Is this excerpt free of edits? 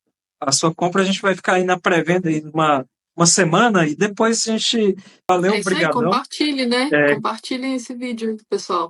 no; 1 cut; at 5.3 s

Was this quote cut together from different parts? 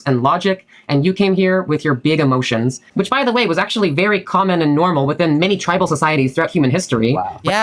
yes; 1 cut; at 2.8 s

